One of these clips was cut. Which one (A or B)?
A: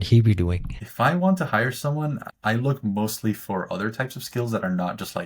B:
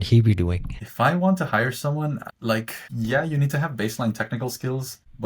A